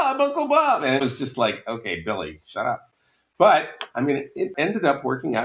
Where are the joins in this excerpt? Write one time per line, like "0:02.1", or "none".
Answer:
0:01.0
0:04.5